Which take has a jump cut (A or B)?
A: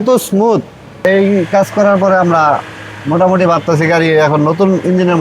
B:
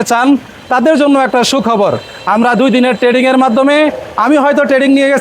A